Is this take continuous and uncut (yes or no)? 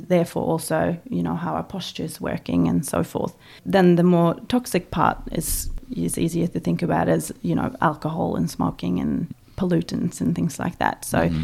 no